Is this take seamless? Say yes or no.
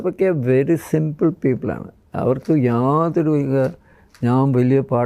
yes